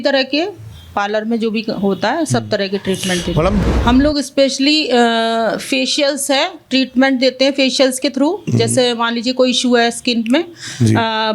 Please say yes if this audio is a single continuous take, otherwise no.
no